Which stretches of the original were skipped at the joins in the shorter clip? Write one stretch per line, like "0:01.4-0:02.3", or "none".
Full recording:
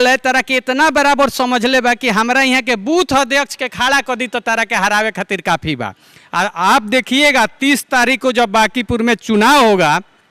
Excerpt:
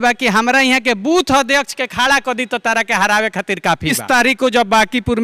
0:05.8-0:07.8